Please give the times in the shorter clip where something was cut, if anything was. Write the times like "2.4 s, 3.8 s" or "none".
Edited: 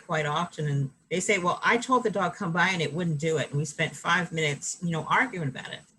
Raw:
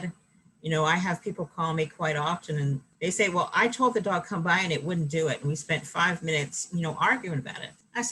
none